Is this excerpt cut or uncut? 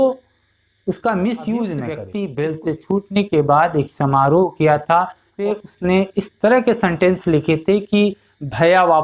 cut